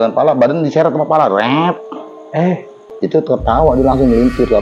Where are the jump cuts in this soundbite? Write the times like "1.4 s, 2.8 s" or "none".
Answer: 2.8 s